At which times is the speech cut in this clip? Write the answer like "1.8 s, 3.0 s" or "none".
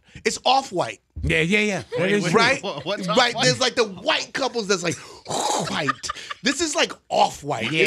none

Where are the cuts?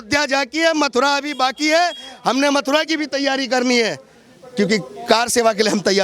none

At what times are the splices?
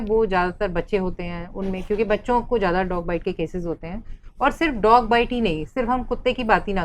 none

